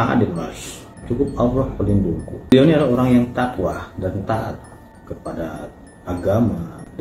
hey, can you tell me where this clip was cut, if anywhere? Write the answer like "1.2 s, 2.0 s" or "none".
2.5 s